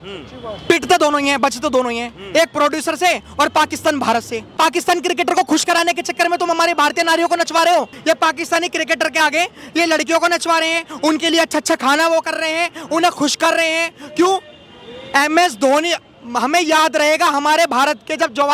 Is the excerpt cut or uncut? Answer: cut